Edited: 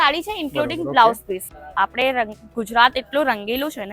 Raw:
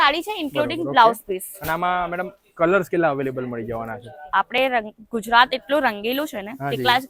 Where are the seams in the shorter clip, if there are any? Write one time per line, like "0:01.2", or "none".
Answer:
0:01.5